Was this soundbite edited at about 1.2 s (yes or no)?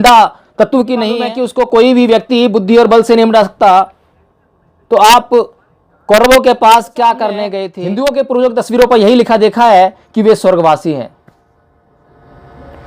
yes